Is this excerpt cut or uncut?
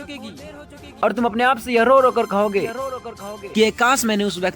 cut